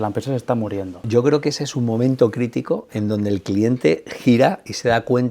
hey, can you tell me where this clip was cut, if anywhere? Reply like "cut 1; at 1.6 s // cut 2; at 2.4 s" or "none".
cut 1; at 1.0 s